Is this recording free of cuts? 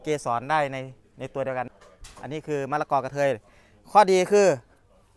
no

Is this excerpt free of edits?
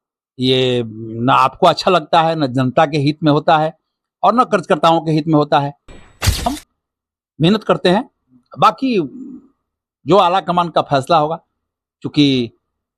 no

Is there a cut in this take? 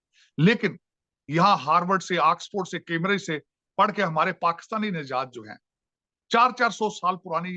no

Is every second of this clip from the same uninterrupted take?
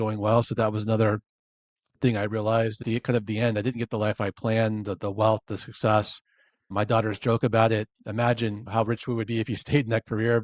no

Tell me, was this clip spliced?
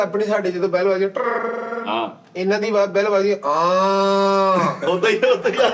no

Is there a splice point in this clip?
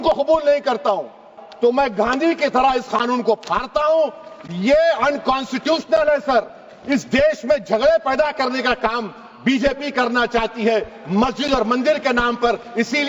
yes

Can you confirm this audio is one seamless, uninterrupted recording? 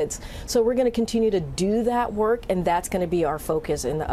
yes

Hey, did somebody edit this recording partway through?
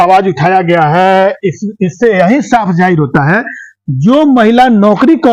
no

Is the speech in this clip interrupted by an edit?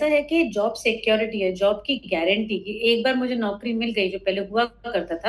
no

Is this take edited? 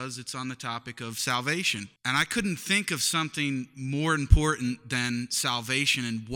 yes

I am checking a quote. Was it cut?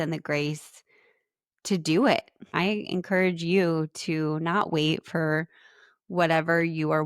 yes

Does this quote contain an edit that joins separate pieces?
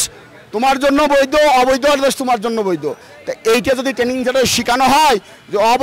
no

